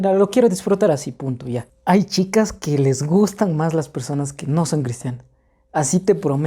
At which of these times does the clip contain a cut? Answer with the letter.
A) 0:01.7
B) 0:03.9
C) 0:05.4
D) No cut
A